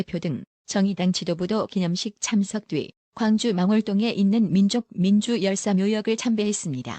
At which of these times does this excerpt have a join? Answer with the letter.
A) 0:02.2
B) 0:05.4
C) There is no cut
B